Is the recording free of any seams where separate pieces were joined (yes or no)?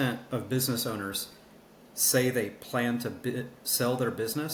yes